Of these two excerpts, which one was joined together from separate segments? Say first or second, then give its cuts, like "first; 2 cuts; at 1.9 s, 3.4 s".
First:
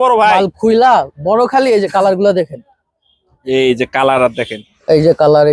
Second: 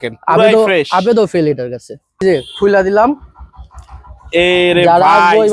second; 1 cut; at 2.2 s